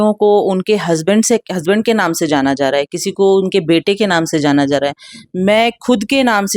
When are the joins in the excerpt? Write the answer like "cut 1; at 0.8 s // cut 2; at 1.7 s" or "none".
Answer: none